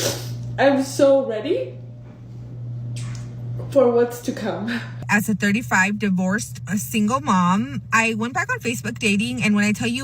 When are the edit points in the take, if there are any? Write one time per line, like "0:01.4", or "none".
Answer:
0:05.0